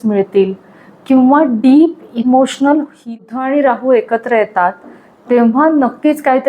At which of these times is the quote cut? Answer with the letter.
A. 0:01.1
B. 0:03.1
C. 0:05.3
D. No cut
B